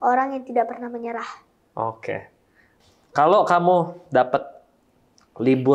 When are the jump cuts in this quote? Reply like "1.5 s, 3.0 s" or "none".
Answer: 2.6 s